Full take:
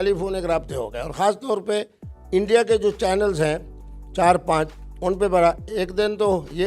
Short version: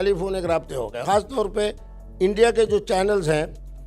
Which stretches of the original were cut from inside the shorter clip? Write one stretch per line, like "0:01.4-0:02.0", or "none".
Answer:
0:01.0-0:01.1